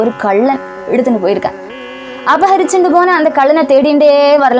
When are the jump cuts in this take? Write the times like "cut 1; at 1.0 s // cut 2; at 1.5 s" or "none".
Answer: cut 1; at 1.8 s